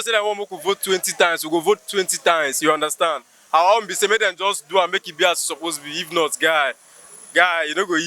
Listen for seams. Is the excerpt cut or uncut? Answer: uncut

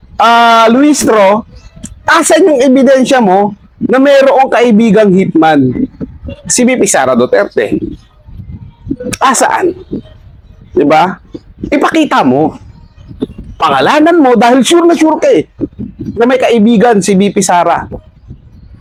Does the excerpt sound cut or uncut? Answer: uncut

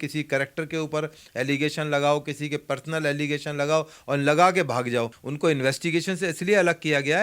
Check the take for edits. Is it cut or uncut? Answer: cut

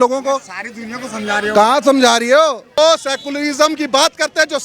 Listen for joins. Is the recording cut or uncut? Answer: cut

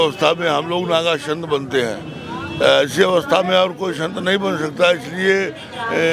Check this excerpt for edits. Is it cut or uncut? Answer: uncut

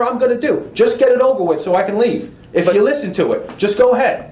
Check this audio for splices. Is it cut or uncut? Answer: uncut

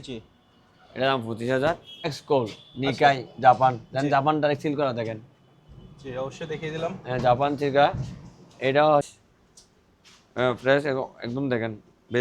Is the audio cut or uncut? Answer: cut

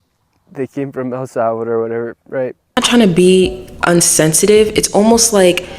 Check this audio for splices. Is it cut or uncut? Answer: cut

